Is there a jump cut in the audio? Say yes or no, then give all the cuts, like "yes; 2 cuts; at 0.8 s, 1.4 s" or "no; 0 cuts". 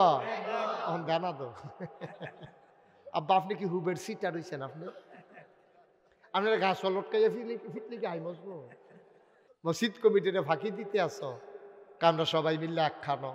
yes; 1 cut; at 9.4 s